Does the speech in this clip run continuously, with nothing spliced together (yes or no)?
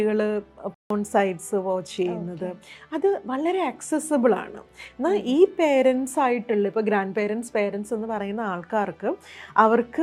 yes